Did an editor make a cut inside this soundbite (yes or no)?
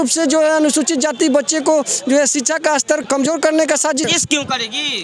yes